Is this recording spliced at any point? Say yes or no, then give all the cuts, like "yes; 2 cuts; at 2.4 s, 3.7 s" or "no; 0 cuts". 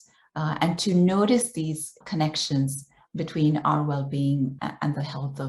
yes; 2 cuts; at 2.0 s, 4.6 s